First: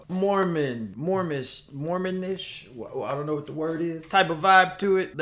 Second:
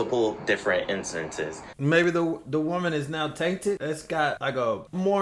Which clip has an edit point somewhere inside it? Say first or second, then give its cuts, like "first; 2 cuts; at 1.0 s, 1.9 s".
second; 1 cut; at 1.7 s